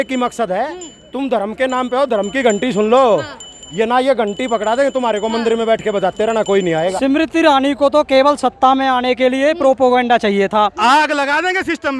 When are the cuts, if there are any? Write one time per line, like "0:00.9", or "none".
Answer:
0:07.0
0:10.8